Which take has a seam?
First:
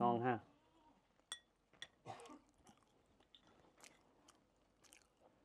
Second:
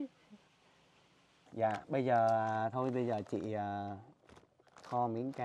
second; 1 cut; at 1.4 s

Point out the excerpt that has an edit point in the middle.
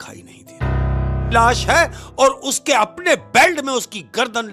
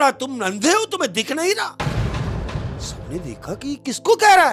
first; 1 cut; at 1.3 s

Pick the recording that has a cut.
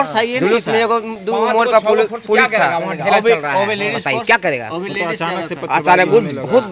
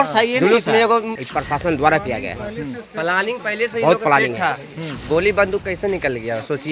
second; 1 cut; at 1.1 s

